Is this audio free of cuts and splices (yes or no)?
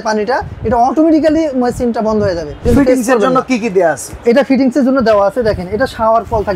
no